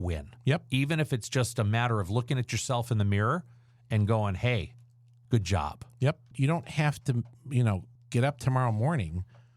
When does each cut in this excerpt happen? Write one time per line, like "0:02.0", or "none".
0:06.3
0:07.9

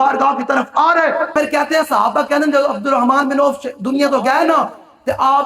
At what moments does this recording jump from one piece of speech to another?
0:01.3

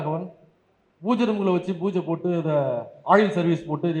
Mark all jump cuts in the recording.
none

